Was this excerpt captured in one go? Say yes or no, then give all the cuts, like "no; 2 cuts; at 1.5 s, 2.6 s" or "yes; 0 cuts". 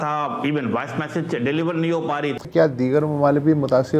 no; 1 cut; at 2.4 s